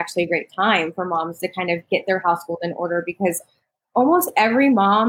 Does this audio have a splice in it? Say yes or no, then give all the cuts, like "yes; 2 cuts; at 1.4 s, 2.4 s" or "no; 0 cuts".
no; 0 cuts